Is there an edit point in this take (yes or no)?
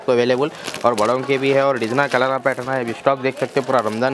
no